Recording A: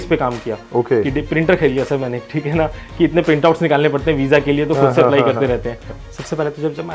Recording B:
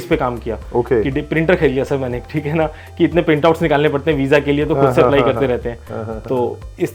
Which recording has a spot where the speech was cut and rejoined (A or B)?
A